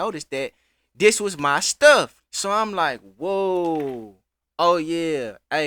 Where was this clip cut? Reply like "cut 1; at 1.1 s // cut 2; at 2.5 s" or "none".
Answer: cut 1; at 2.2 s